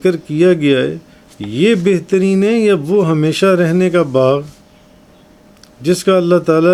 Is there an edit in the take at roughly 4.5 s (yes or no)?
no